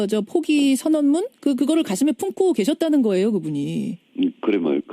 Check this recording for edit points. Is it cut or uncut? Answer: uncut